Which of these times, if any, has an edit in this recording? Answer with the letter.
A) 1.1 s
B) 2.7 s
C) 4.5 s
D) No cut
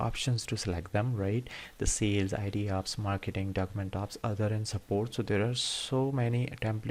D